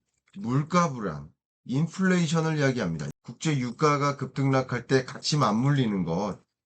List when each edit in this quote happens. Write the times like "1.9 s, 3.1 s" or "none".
3.0 s